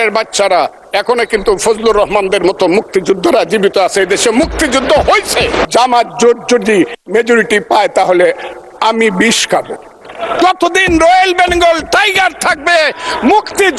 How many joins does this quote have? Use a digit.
2